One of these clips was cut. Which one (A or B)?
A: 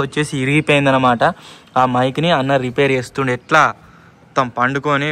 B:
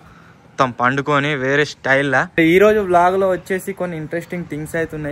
B